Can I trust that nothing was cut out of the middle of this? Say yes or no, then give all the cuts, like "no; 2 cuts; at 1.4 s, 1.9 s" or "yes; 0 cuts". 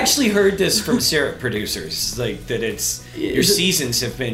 yes; 0 cuts